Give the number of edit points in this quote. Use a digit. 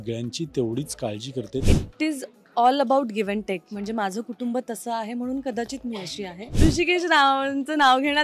2